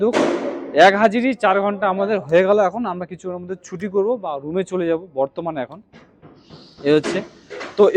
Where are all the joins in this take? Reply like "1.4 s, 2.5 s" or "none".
none

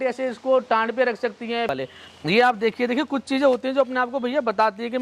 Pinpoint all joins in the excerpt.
1.7 s

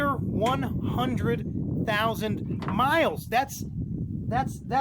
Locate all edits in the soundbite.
none

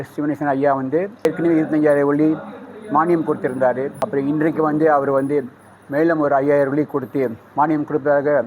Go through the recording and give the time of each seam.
1.2 s, 4.0 s, 7.4 s

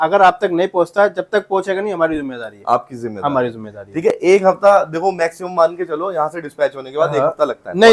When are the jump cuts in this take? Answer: none

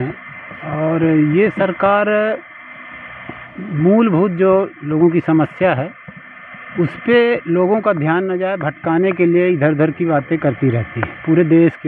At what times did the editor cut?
none

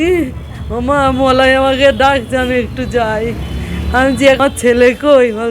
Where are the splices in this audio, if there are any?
4.4 s

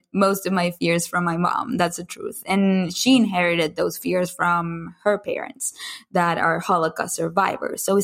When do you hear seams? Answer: none

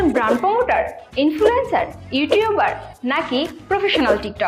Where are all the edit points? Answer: none

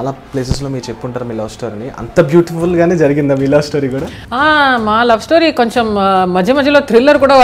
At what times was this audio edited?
4.2 s

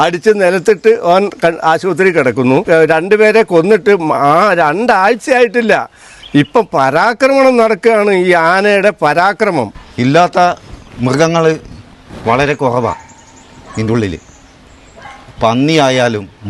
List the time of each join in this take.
2.6 s, 9.8 s

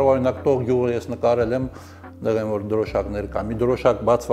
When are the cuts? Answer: none

